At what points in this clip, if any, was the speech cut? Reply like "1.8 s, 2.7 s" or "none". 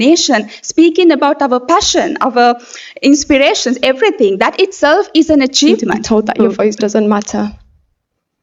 5.9 s